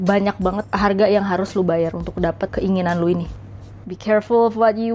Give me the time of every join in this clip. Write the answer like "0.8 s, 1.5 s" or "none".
3.8 s